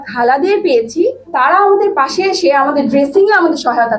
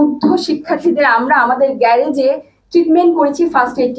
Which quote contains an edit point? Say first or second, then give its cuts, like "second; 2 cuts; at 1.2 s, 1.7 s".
first; 1 cut; at 1.3 s